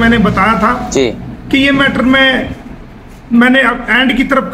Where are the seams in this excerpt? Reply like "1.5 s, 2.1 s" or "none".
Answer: none